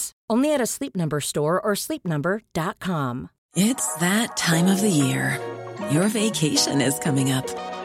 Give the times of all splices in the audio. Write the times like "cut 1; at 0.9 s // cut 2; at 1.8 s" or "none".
cut 1; at 3.4 s